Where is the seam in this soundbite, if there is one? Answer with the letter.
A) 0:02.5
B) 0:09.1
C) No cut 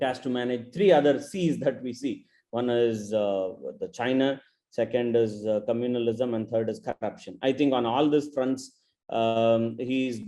C